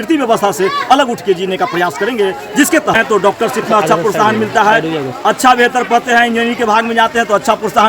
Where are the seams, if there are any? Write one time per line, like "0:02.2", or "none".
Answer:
0:02.9